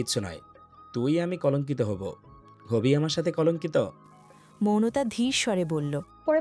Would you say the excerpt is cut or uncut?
uncut